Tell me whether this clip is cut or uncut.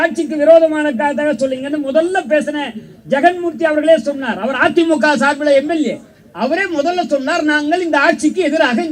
uncut